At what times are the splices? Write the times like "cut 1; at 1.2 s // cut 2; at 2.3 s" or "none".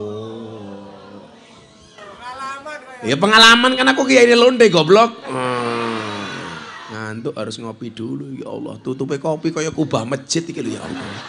cut 1; at 6.8 s